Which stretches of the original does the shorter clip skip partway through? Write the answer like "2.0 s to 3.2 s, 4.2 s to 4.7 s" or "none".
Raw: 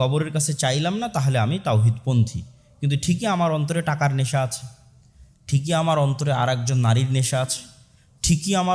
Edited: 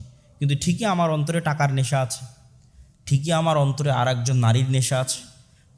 none